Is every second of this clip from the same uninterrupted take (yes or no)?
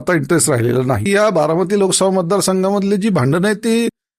no